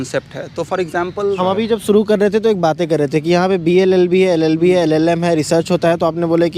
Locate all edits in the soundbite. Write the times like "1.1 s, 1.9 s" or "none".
1.4 s

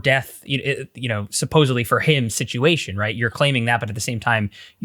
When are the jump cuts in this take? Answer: none

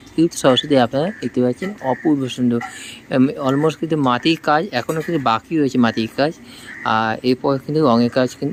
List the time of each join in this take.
none

